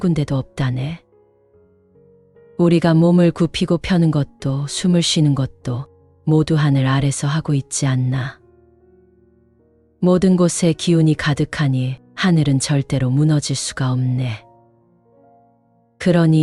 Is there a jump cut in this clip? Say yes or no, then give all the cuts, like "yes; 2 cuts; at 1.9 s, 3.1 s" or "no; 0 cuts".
no; 0 cuts